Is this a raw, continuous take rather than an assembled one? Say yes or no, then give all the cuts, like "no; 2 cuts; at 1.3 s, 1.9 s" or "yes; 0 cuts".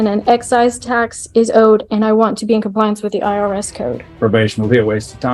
no; 1 cut; at 4.1 s